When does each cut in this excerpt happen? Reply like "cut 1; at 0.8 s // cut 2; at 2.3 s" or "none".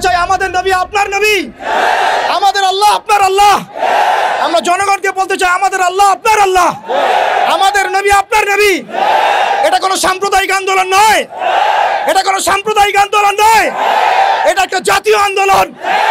none